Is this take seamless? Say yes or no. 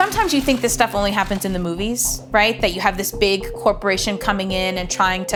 yes